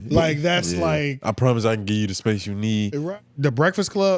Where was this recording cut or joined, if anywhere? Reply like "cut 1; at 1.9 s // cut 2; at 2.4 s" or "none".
cut 1; at 3.0 s